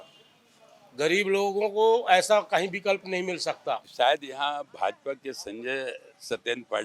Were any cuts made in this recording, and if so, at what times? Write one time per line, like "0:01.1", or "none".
0:03.9